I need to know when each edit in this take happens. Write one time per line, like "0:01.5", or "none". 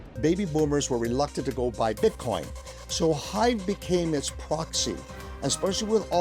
none